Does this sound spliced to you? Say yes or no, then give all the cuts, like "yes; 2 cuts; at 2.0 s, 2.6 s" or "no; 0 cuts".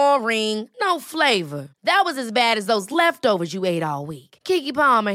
no; 0 cuts